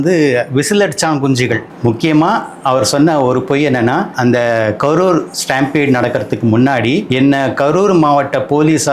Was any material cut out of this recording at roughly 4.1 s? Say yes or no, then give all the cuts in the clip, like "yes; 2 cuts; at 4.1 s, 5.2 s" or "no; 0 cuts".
yes; 3 cuts; at 1.7 s, 4.1 s, 7.1 s